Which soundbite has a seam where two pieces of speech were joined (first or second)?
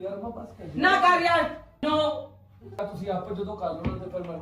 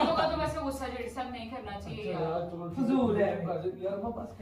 first